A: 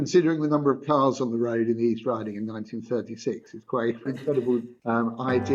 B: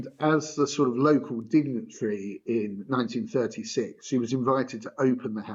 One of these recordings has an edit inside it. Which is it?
A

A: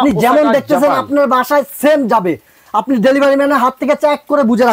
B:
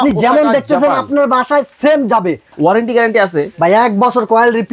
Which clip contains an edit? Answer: B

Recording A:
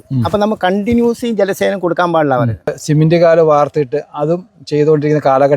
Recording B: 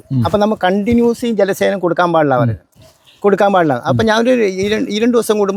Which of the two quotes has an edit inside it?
A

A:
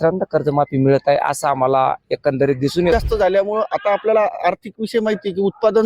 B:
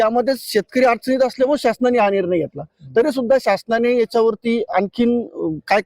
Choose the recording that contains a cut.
A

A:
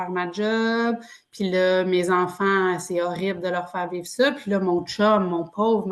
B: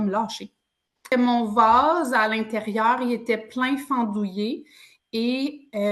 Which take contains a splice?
B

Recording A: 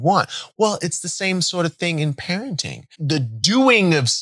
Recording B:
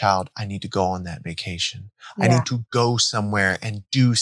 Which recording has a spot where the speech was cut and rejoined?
A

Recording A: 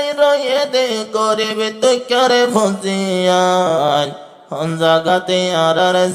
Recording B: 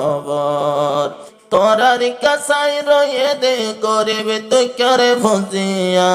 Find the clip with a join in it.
B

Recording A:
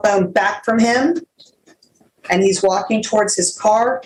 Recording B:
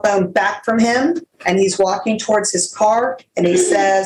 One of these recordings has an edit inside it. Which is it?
B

